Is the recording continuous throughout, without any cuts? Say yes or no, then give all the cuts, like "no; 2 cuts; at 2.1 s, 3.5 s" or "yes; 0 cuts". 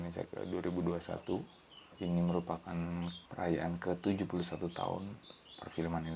no; 2 cuts; at 1.9 s, 3.2 s